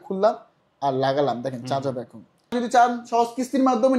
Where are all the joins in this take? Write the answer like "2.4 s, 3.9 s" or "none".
2.5 s